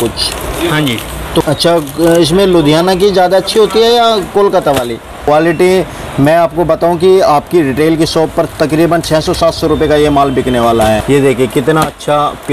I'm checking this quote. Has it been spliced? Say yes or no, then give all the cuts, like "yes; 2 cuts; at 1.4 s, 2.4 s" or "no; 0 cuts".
yes; 3 cuts; at 1.4 s, 5.2 s, 11.0 s